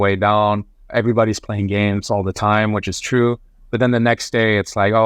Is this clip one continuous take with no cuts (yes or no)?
yes